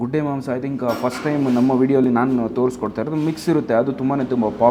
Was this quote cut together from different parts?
no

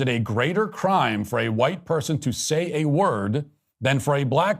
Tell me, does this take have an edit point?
no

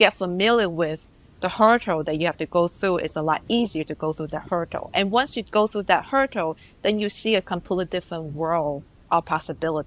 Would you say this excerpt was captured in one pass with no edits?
no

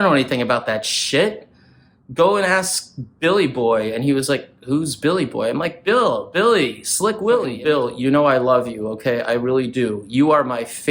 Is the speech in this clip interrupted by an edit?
yes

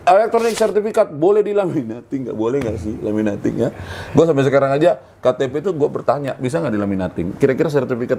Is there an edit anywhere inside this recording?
no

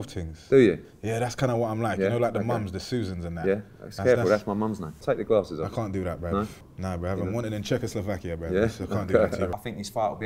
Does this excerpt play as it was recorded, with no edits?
no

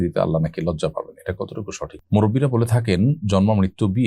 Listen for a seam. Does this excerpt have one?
yes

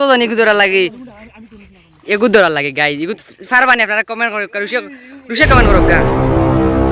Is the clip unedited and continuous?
no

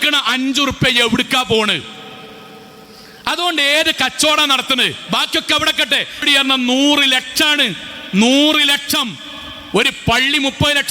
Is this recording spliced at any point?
yes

